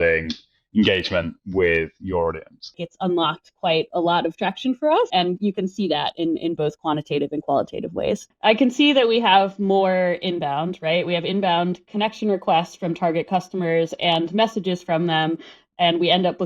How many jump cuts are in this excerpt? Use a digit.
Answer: 3